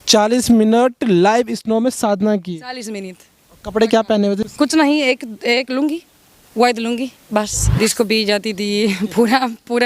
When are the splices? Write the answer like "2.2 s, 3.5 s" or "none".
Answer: 4.4 s, 7.6 s